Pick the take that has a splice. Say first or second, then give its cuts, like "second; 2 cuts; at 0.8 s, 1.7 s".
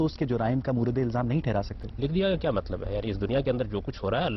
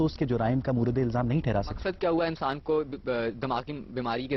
second; 1 cut; at 1.8 s